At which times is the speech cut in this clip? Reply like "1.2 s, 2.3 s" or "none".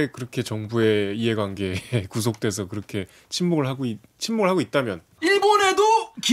none